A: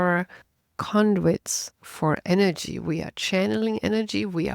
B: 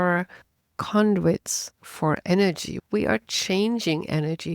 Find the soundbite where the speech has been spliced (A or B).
B